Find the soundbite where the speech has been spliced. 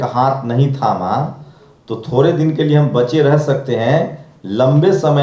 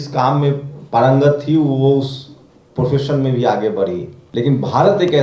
second; 1 cut; at 4.2 s

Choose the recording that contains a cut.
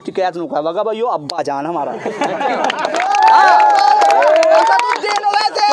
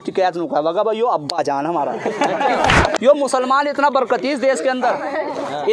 second; 1 cut; at 2.9 s

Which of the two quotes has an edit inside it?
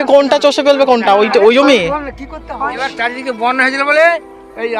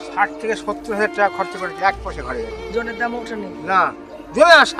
first; 1 cut; at 2.4 s

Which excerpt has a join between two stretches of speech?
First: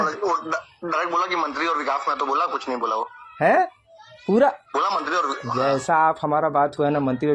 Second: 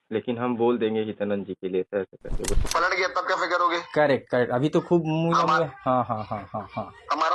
second; 1 cut; at 2.5 s

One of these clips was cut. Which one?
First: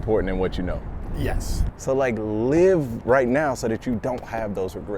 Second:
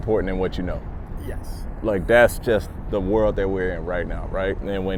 first; 1 cut; at 1.7 s

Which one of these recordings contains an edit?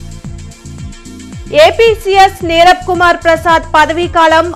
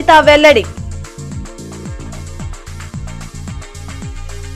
first; 1 cut; at 1.0 s

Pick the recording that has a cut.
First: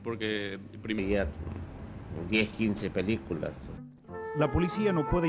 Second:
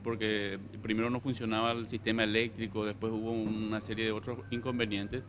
second; 1 cut; at 1.0 s

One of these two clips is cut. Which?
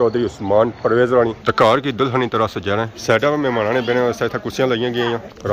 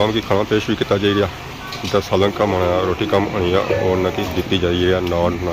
first; 2 cuts; at 1.3 s, 2.9 s

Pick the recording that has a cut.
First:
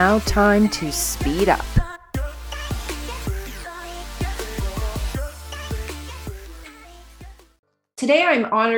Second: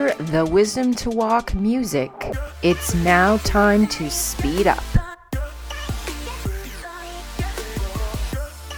first; 1 cut; at 7.7 s

